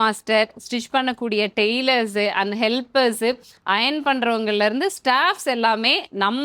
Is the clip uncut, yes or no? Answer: yes